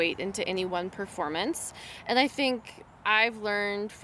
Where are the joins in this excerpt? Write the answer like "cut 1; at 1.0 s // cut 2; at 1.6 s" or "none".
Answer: none